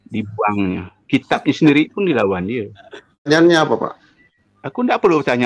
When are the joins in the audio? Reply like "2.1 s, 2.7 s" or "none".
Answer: 3.3 s